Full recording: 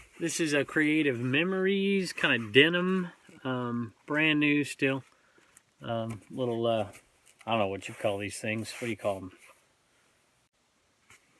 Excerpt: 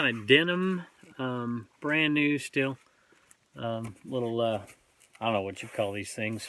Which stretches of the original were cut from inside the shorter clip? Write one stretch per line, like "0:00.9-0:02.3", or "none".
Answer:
none